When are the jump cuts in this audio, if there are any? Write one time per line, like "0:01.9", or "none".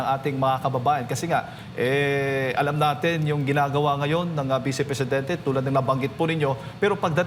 none